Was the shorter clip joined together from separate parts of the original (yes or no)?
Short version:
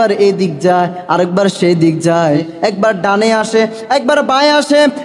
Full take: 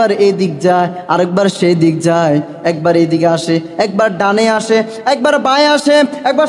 yes